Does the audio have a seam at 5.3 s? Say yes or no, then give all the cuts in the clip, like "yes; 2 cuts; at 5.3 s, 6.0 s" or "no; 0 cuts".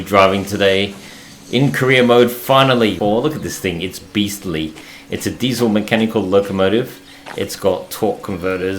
no; 1 cut; at 3.0 s